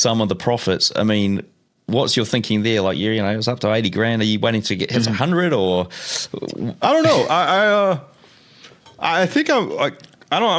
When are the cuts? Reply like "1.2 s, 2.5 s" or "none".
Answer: none